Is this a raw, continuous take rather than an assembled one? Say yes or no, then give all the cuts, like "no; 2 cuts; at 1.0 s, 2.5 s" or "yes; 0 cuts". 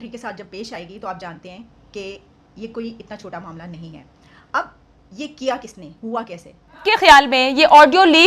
no; 1 cut; at 6.8 s